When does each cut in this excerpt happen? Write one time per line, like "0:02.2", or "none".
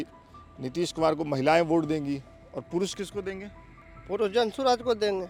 none

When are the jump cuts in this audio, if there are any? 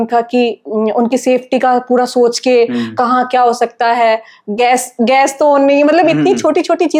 none

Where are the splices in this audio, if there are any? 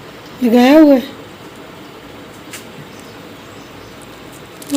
none

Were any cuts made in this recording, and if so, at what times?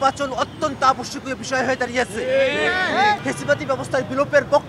0:03.3

